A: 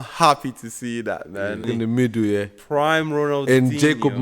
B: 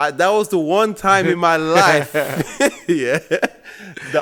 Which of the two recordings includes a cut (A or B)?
A